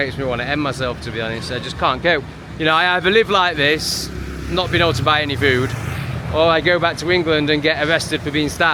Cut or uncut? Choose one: uncut